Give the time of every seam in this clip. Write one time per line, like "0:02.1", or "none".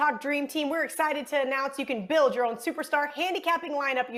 none